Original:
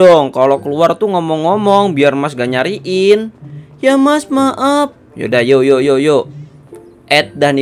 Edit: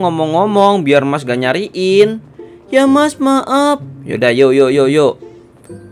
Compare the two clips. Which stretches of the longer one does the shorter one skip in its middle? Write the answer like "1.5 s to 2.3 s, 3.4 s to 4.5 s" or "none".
none